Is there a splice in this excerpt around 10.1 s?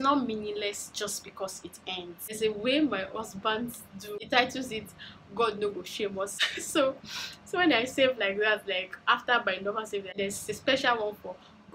yes; 4 cuts; at 2.4 s, 4.2 s, 6.3 s, 10.1 s

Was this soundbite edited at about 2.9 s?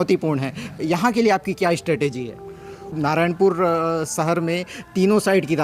yes; 1 cut; at 2.9 s

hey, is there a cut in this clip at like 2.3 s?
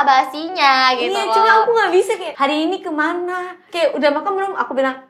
yes; 2 cuts; at 2.3 s, 3.6 s

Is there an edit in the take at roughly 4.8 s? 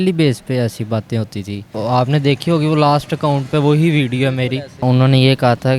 yes; 2 cuts; at 1.6 s, 4.8 s

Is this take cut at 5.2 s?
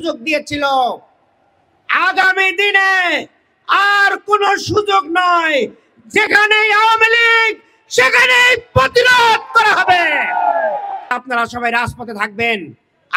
no; 1 cut; at 11.1 s

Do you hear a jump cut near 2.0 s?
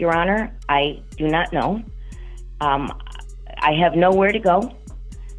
no; 0 cuts

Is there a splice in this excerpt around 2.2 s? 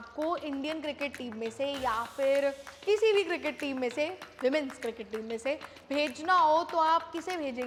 no; 0 cuts

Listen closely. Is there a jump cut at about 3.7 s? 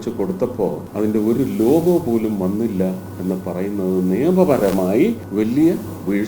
no; 2 cuts; at 0.8 s, 5.2 s

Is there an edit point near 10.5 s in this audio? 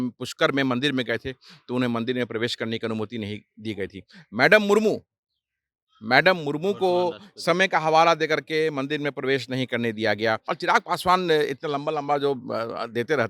yes; 1 cut; at 10.5 s

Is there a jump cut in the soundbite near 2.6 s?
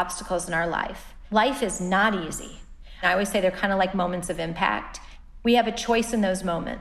yes; 1 cut; at 2.6 s

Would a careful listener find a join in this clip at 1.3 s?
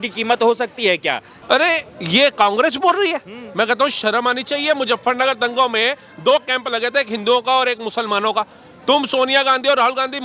yes; 1 cut; at 1.3 s

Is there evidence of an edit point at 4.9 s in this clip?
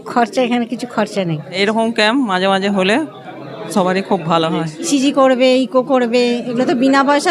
yes; 2 cuts; at 1.6 s, 4.9 s

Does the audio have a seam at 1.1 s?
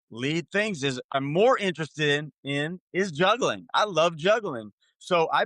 yes; 1 cut; at 1.1 s

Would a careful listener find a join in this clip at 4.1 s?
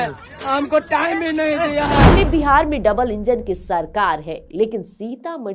no; 1 cut; at 2.1 s

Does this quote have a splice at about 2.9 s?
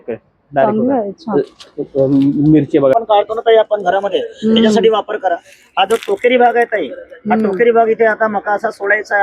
yes; 1 cut; at 2.9 s

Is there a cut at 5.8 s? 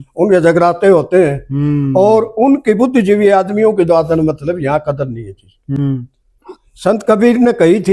yes; 1 cut; at 5.8 s

